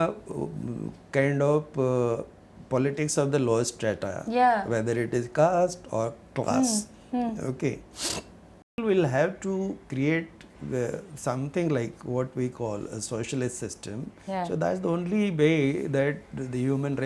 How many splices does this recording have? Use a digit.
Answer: 1